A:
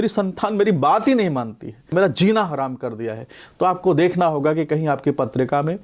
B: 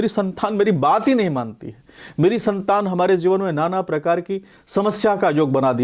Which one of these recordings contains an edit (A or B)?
A